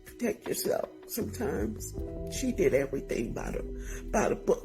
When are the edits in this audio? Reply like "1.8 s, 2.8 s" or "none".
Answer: none